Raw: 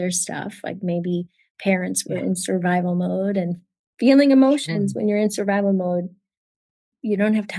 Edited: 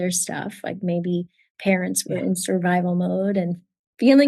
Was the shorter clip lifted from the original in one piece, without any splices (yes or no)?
yes